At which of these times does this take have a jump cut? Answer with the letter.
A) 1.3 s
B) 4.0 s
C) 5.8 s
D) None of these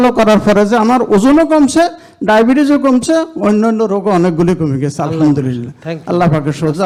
D